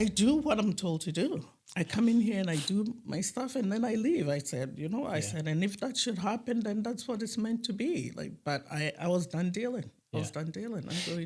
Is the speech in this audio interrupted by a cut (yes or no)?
no